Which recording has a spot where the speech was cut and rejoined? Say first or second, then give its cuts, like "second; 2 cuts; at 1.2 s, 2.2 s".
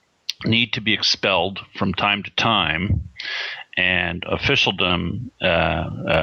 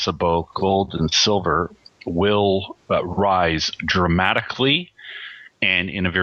first; 1 cut; at 4.9 s